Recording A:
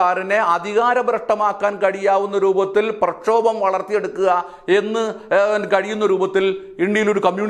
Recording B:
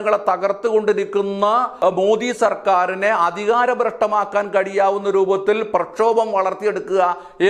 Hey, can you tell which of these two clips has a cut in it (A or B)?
B